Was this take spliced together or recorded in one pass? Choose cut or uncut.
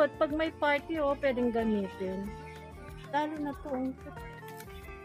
cut